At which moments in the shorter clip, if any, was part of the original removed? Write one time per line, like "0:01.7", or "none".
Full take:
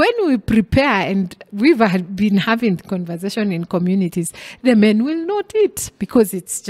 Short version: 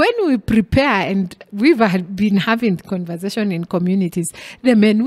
none